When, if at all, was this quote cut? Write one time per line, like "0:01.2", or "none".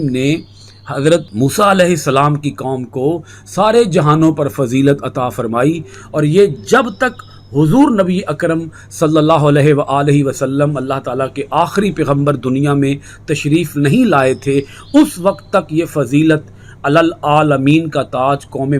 0:01.3